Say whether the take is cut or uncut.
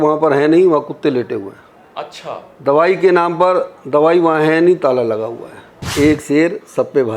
cut